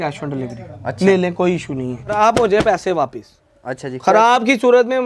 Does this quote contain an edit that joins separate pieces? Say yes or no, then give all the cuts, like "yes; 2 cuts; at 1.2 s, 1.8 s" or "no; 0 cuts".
yes; 1 cut; at 2.1 s